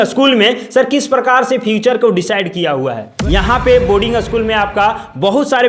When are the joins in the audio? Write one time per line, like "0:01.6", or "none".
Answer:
0:03.1